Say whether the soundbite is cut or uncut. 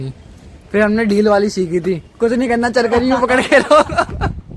uncut